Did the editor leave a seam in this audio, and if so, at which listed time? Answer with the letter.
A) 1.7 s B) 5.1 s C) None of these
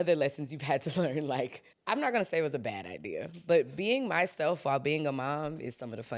A